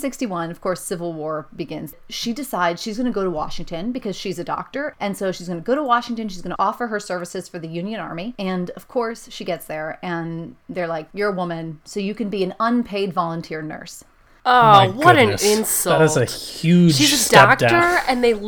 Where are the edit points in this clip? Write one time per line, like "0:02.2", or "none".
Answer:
0:02.0
0:04.9
0:08.3
0:11.8